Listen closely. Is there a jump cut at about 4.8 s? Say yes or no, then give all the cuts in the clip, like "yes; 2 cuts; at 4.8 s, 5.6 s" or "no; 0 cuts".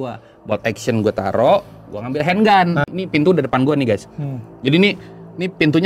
no; 1 cut; at 2.8 s